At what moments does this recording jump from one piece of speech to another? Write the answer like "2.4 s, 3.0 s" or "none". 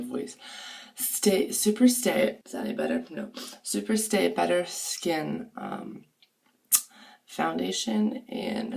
2.4 s